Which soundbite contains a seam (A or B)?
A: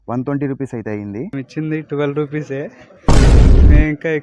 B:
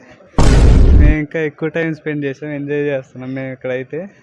A